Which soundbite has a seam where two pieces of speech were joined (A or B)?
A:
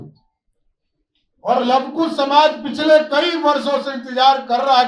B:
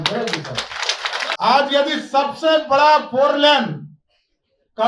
B